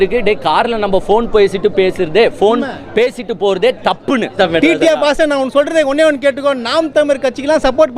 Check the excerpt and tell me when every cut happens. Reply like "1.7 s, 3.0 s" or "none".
4.3 s